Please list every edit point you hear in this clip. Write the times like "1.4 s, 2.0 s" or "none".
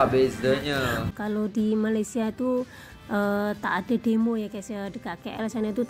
1.0 s